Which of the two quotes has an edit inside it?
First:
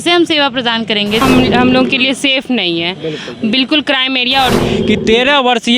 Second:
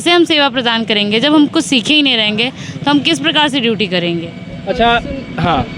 first; 2 cuts; at 1.2 s, 4.6 s

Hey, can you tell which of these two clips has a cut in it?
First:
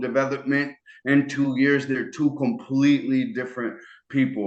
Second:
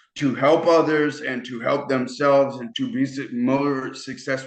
second; 1 cut; at 2.6 s

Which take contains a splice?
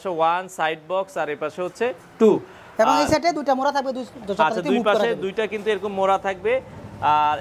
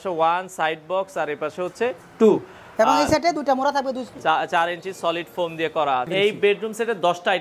second; 2 cuts; at 4.1 s, 6.1 s

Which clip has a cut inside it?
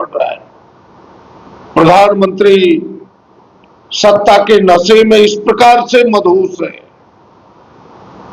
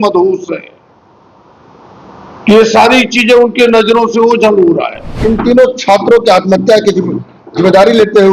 second; 1 cut; at 5.1 s

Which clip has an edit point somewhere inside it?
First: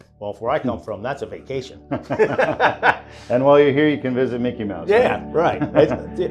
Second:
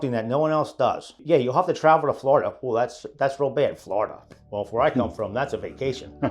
second; 1 cut; at 1.1 s

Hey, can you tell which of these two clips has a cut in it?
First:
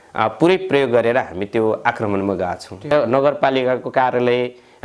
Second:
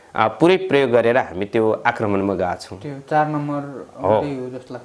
first; 1 cut; at 2.9 s

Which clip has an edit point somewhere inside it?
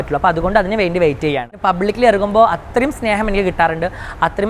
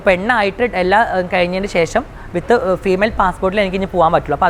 first; 1 cut; at 1.5 s

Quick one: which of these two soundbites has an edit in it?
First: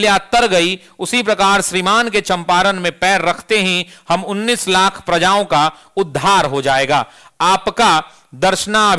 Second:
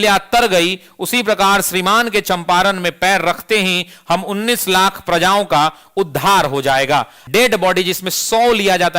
second; 1 cut; at 7.2 s

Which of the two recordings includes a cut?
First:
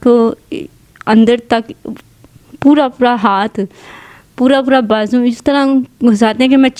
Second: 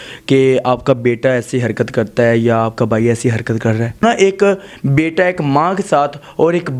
second; 1 cut; at 4.0 s

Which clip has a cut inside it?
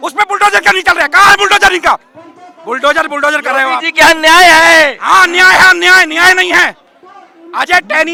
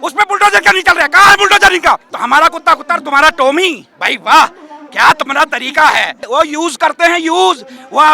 second; 2 cuts; at 2.1 s, 6.2 s

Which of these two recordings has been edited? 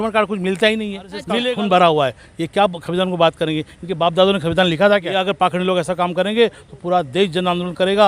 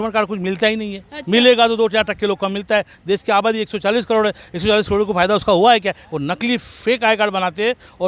first; 2 cuts; at 1.3 s, 5.2 s

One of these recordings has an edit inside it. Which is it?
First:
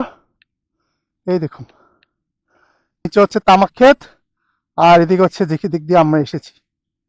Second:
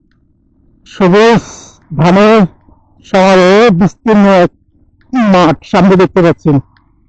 first; 1 cut; at 3.1 s

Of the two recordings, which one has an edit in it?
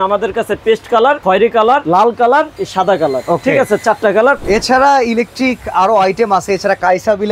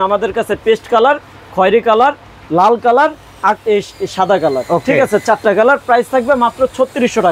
first; 3 cuts; at 1.5 s, 2.6 s, 4.4 s

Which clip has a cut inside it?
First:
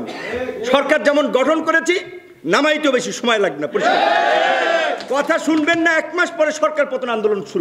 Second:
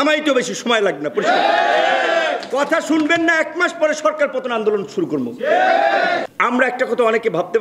second; 1 cut; at 6.2 s

